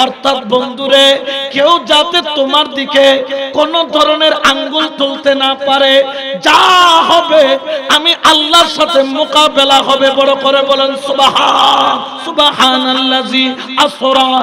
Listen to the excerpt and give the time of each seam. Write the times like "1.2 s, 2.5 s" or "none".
12.2 s

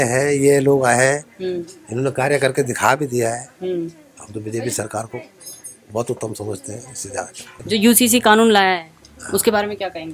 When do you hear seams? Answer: 7.6 s

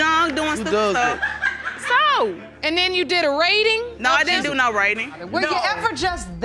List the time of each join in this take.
3.9 s, 5.2 s

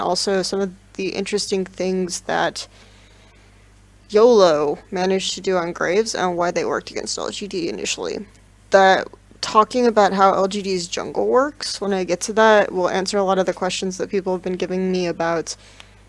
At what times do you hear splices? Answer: none

